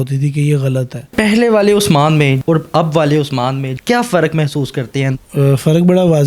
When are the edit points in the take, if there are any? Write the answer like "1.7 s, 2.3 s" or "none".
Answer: 1.1 s, 2.4 s, 3.7 s, 5.1 s